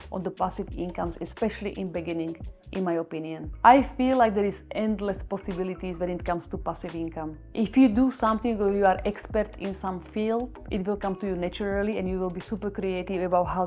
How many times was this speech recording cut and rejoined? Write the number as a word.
two